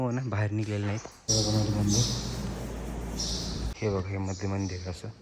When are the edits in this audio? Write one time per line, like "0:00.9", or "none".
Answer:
0:01.1
0:03.7